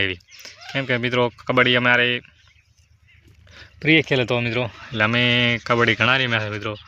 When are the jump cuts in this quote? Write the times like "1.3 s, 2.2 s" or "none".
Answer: none